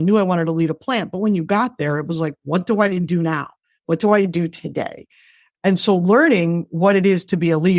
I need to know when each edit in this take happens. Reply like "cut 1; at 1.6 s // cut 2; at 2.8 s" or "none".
none